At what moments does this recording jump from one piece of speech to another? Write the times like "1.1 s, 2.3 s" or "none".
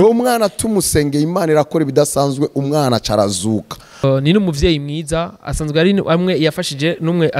4.0 s